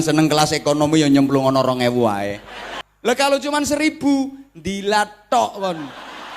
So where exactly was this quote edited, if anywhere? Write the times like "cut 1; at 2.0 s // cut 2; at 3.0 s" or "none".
cut 1; at 2.9 s

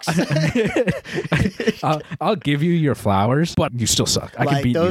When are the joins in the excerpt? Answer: cut 1; at 3.7 s

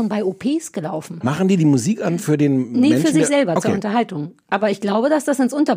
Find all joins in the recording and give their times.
cut 1; at 1.2 s

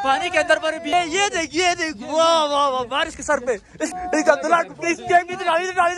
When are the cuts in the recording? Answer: cut 1; at 0.9 s // cut 2; at 3.9 s

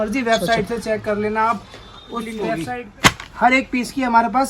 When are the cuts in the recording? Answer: cut 1; at 2.6 s

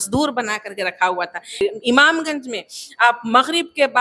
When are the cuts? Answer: cut 1; at 1.6 s

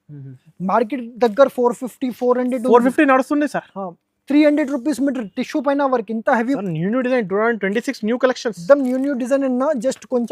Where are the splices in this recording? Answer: cut 1; at 6.6 s

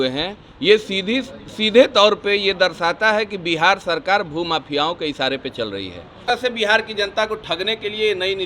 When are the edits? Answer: cut 1; at 6.3 s

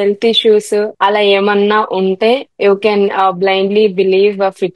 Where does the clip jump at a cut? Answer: cut 1; at 0.9 s // cut 2; at 2.5 s

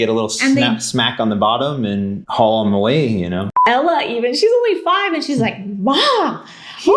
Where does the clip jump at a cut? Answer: cut 1; at 2.2 s // cut 2; at 3.6 s

